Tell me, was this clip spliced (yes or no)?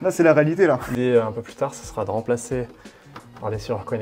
yes